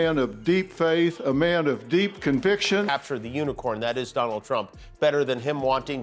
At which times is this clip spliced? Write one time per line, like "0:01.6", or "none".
0:02.9